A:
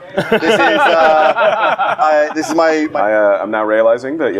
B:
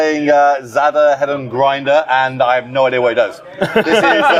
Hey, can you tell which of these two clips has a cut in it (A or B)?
A